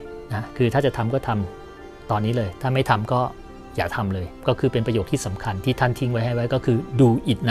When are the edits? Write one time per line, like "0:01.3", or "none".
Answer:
none